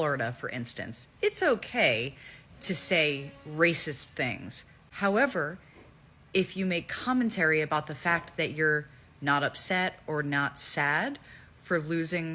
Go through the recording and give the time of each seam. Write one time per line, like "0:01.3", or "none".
none